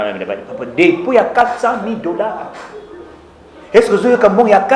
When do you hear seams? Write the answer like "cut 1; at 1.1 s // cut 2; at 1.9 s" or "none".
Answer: none